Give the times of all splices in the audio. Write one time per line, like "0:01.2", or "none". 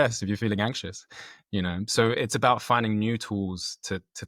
none